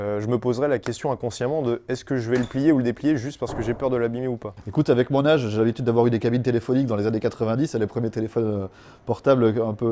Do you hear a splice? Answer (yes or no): yes